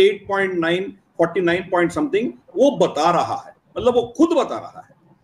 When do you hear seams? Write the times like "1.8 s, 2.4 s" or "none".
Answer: none